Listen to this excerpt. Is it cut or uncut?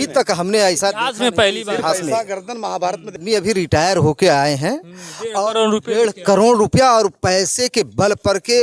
cut